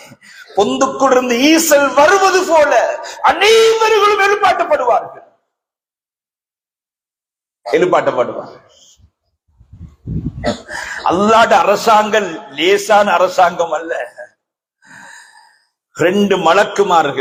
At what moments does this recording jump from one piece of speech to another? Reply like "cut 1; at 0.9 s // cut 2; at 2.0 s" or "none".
none

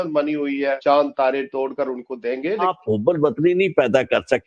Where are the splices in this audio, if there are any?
cut 1; at 0.8 s // cut 2; at 2.7 s

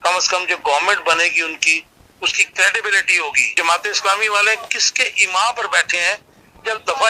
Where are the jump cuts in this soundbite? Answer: cut 1; at 3.5 s

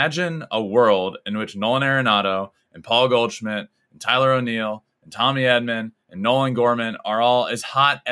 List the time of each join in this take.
none

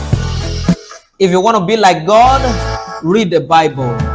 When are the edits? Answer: cut 1; at 1.0 s

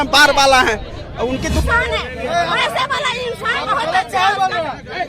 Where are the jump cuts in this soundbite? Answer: cut 1; at 1.6 s

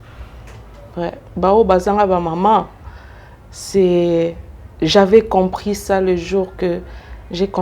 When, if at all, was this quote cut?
cut 1; at 1.2 s

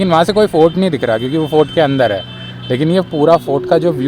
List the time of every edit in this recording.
none

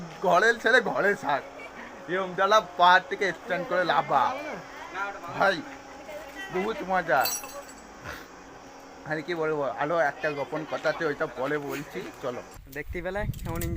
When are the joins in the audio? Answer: cut 1; at 12.6 s

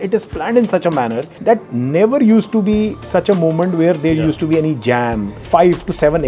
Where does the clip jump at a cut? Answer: cut 1; at 1.3 s // cut 2; at 5.4 s

